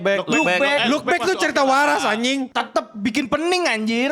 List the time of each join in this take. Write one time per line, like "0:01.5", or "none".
0:02.5

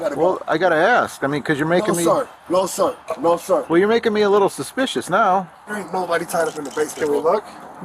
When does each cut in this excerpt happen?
0:05.6

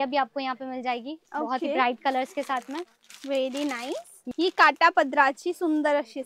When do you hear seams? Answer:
0:04.2

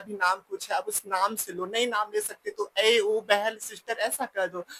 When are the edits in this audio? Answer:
none

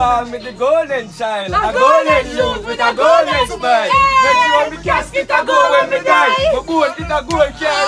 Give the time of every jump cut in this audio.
none

